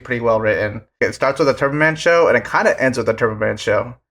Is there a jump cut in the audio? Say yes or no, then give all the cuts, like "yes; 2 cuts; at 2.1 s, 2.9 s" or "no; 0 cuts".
yes; 1 cut; at 1.0 s